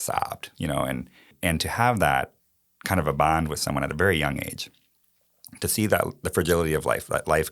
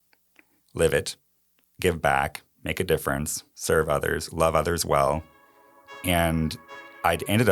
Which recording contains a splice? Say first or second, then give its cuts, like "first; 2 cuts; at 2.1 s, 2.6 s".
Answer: first; 1 cut; at 1.3 s